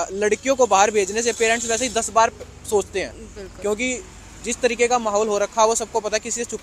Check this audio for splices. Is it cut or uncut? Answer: uncut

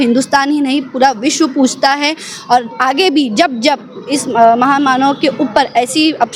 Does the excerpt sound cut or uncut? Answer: uncut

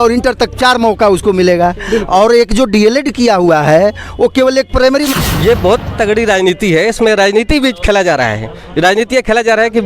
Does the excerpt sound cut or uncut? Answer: cut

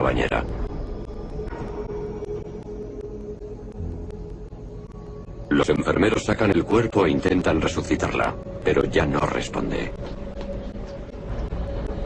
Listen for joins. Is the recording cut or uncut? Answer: cut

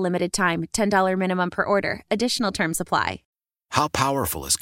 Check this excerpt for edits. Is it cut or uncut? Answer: cut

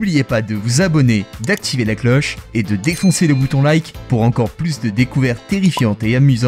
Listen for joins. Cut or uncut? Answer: uncut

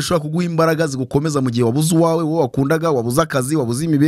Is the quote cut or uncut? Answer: uncut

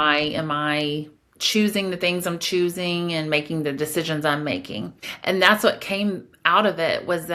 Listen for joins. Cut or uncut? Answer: uncut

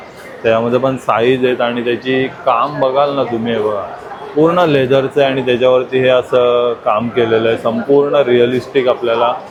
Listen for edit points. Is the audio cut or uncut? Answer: uncut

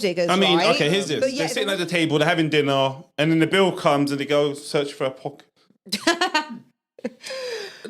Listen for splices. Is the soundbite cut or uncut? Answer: cut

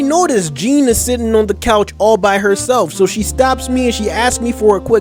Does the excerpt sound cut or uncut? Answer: uncut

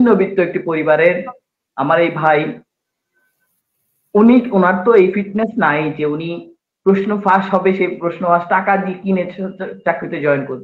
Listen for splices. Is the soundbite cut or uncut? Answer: uncut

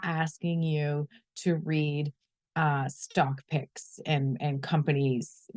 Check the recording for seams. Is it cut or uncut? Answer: uncut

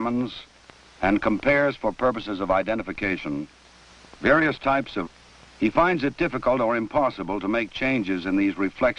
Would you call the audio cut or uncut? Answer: uncut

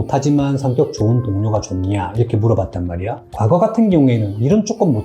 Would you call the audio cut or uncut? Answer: uncut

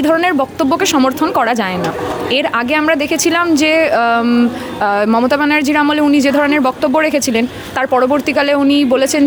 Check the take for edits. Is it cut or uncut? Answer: uncut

